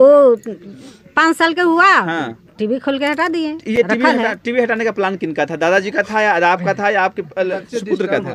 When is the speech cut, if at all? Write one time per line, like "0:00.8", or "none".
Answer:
none